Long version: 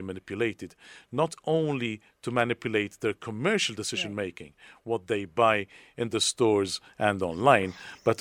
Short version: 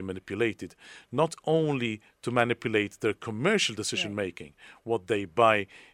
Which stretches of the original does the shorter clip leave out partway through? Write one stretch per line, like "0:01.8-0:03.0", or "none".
none